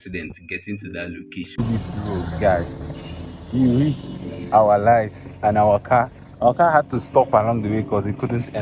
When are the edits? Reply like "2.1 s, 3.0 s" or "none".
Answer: 1.6 s